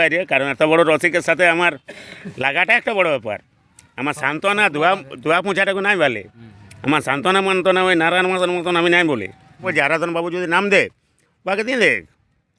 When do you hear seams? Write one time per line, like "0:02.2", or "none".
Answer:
0:09.7

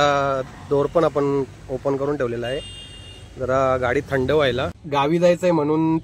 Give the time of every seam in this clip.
0:04.7

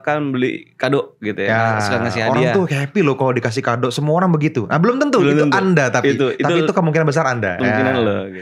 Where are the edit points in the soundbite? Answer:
none

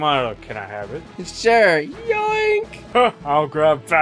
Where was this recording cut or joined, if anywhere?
0:01.2
0:02.8

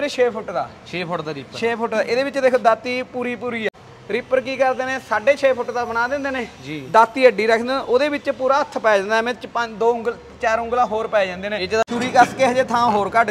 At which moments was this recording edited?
0:03.7
0:11.9

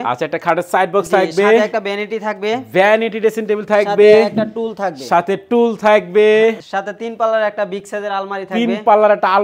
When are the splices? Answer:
none

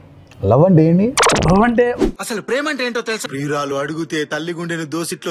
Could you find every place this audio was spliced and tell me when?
0:02.0

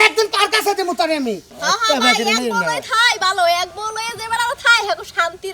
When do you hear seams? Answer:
0:01.5

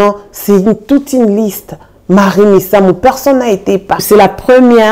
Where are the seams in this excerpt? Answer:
0:03.9

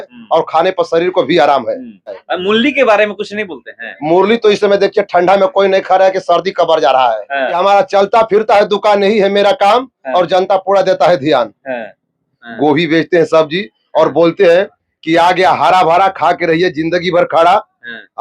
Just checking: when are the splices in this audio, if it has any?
0:02.3
0:07.5
0:12.4

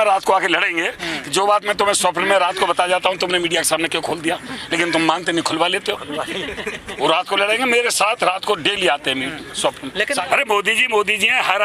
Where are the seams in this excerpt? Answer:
0:10.1

